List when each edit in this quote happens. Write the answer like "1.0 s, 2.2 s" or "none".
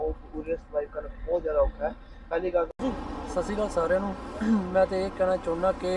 2.8 s